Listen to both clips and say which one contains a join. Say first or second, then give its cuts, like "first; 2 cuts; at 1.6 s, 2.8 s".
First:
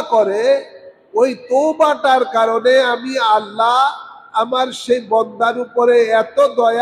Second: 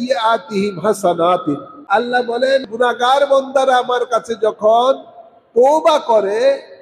second; 2 cuts; at 1.7 s, 2.7 s